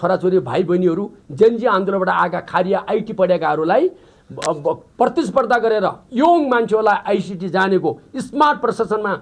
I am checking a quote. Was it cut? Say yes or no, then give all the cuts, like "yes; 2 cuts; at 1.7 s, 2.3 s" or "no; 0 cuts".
no; 0 cuts